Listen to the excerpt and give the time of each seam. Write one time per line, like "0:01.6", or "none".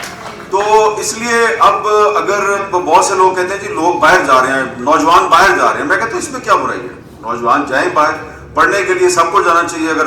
0:02.6

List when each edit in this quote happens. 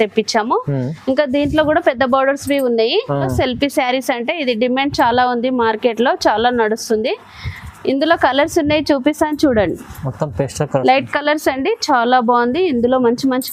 0:03.3

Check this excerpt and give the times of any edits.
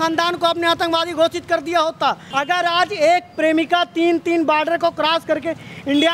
0:02.2

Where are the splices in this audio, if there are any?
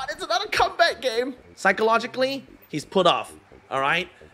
0:01.4

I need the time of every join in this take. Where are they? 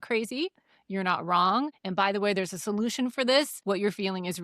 0:01.8
0:03.5

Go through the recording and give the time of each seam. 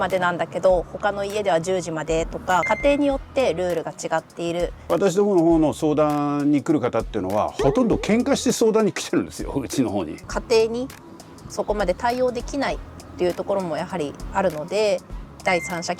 0:02.6
0:04.8
0:10.3

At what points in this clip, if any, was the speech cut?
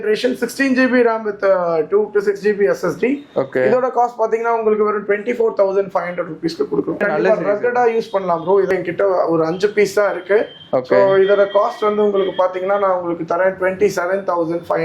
0:07.0
0:08.7

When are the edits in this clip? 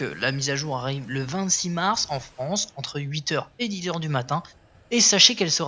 none

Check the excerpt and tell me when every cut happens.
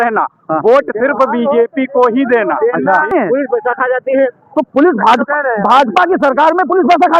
0:03.1

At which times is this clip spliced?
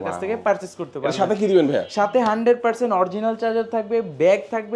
none

